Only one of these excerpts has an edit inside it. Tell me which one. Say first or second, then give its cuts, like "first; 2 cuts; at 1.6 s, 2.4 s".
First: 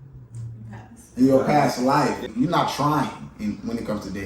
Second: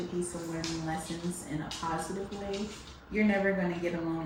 first; 1 cut; at 2.3 s